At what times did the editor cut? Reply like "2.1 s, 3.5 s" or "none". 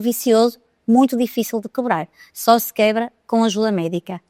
none